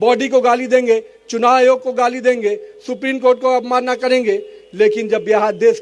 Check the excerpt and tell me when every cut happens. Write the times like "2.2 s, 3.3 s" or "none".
none